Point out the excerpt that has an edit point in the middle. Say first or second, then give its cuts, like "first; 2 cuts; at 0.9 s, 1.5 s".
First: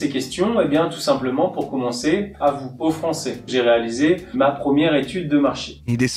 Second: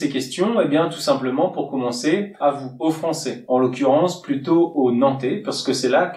first; 1 cut; at 3.5 s